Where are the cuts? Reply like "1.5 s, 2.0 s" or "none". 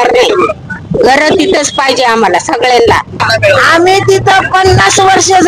3.2 s